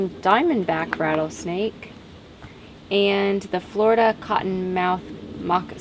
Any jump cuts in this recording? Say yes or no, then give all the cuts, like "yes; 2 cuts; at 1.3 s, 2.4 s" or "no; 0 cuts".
no; 0 cuts